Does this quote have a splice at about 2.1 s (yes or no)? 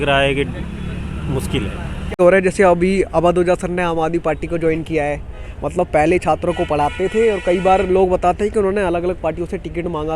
yes